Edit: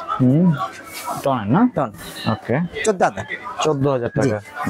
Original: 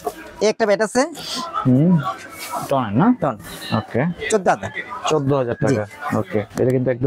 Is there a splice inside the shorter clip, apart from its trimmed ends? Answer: no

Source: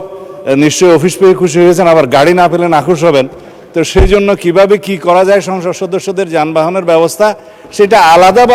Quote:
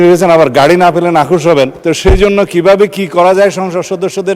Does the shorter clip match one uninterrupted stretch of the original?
no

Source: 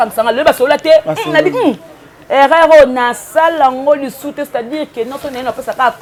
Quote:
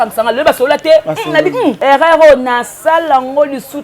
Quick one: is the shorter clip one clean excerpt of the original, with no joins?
no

